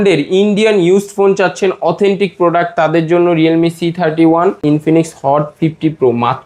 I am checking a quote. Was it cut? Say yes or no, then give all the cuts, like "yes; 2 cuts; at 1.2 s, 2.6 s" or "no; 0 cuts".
yes; 1 cut; at 4.6 s